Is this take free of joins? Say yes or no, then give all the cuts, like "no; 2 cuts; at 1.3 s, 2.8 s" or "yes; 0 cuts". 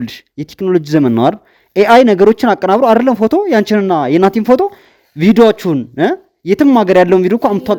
yes; 0 cuts